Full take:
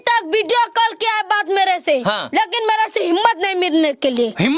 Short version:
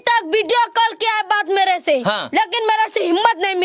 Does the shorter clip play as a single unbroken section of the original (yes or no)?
yes